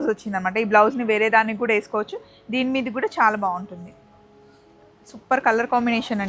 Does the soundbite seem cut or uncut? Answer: uncut